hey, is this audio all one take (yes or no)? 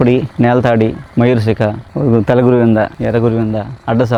yes